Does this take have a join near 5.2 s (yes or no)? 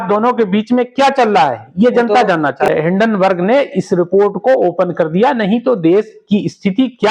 no